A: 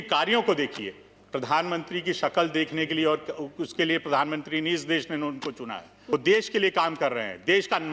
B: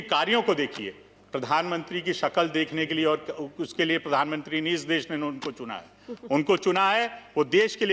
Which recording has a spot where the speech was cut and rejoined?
A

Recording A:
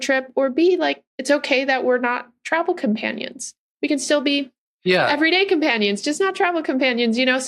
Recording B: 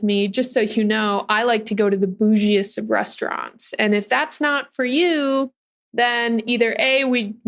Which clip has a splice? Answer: A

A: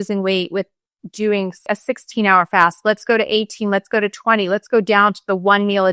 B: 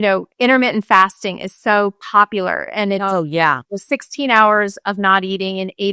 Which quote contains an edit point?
A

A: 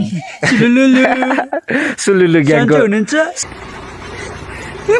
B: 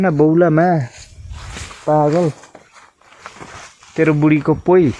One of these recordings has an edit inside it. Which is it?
A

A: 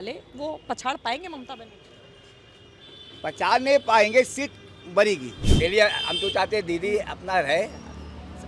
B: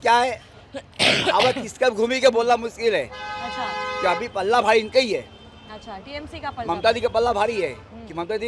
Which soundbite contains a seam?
A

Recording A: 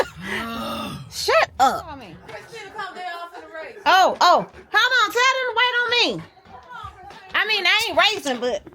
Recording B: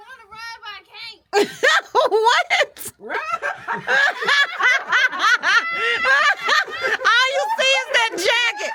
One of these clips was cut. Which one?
A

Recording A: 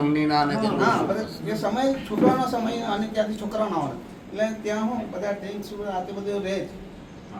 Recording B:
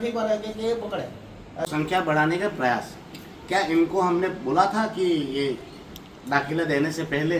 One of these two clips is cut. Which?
B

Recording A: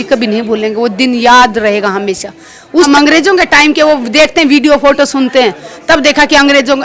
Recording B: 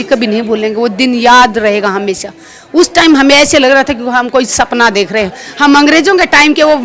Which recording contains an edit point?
A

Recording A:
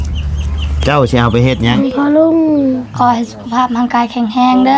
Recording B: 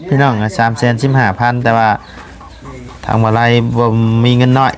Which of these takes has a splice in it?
A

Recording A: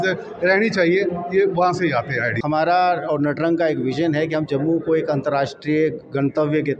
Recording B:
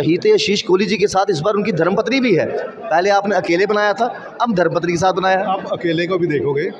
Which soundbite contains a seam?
A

